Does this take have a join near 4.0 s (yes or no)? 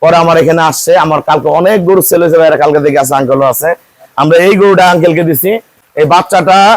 no